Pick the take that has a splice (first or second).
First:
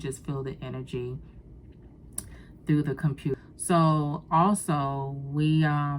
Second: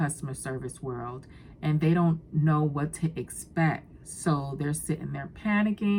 first